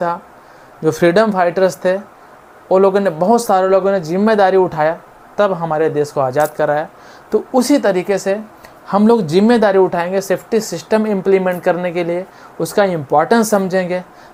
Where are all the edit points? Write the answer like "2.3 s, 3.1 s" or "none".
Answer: none

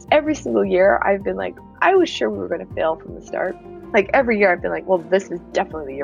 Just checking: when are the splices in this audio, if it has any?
none

